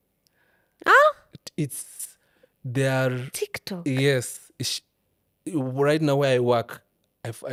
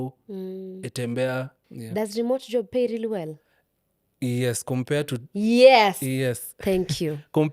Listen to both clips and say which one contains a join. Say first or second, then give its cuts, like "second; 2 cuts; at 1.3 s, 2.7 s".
second; 1 cut; at 1.6 s